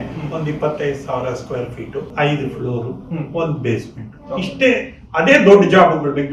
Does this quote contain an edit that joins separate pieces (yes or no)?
yes